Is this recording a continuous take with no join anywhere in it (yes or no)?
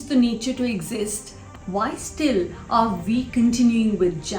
no